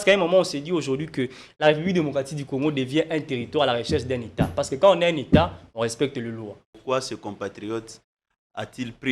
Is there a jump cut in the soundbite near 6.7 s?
yes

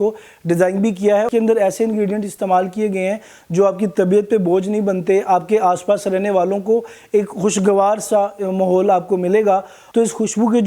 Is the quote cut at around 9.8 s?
yes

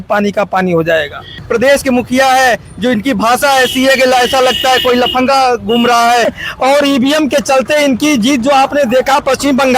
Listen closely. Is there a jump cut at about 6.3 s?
yes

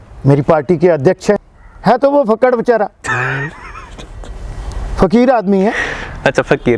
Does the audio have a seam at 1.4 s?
yes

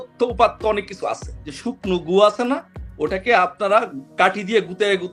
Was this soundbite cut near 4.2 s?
no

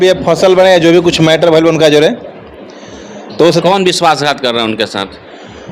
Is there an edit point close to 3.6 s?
yes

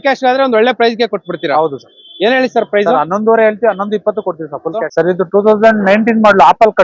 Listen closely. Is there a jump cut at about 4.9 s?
yes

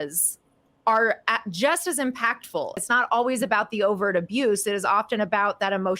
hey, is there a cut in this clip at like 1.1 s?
no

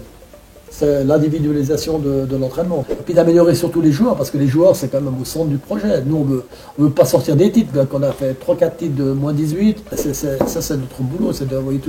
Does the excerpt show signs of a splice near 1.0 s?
no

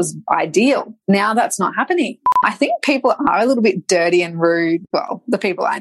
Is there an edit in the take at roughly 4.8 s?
yes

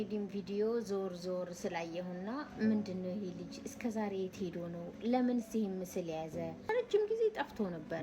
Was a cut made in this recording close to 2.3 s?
no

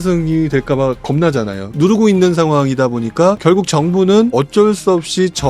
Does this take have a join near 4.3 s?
yes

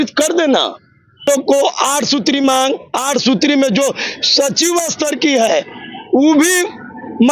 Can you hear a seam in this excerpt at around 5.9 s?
no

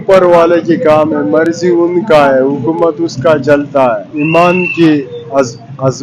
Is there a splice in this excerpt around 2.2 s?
no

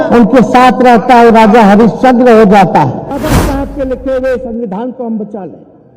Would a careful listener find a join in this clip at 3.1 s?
yes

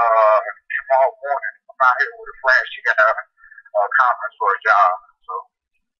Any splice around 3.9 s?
yes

